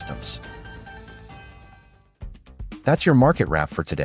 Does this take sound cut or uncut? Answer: uncut